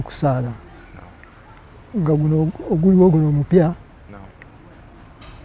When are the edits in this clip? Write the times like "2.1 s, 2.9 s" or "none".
none